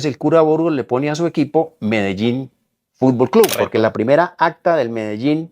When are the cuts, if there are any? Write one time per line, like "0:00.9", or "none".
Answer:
0:03.6